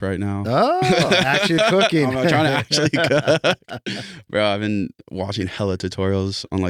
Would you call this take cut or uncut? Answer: uncut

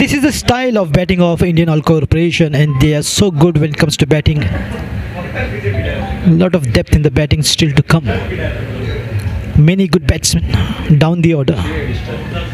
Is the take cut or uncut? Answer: cut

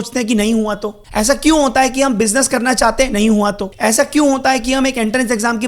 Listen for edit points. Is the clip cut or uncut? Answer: cut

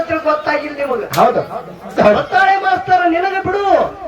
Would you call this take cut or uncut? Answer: cut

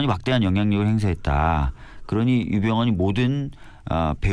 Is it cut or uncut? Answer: uncut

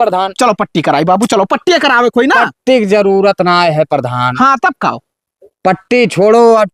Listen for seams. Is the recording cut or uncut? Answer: uncut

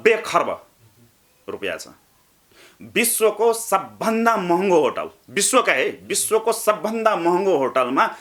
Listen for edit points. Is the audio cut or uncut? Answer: uncut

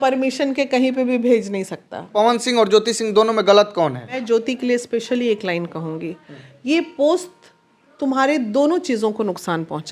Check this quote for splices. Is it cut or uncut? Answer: cut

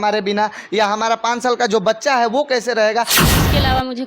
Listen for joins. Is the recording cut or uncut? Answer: cut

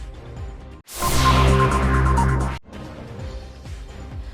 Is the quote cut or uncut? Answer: cut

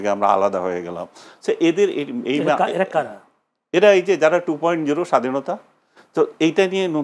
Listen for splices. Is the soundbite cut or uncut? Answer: uncut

